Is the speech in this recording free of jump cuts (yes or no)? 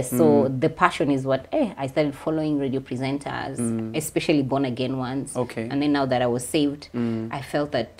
yes